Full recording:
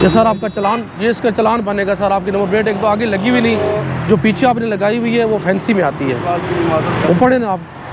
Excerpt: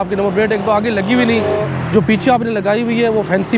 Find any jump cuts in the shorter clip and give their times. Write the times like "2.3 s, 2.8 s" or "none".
none